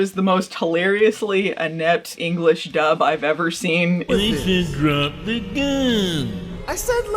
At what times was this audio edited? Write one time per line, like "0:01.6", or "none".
0:02.1
0:04.0